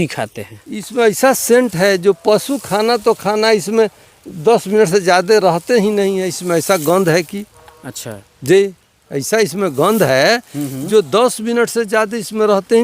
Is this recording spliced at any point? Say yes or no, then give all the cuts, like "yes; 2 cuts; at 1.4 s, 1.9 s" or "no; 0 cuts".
no; 0 cuts